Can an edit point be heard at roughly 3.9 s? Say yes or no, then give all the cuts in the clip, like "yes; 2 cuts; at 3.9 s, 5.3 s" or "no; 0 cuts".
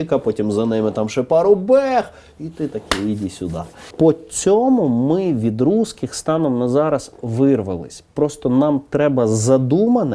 yes; 1 cut; at 3.9 s